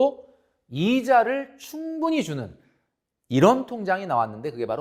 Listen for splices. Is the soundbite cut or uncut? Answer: uncut